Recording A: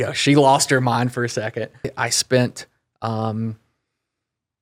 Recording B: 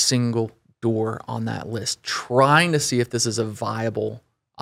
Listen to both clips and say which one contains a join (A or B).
A